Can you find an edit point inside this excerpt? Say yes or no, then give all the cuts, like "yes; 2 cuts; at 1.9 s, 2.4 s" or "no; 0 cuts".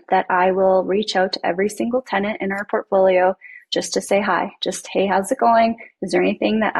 no; 0 cuts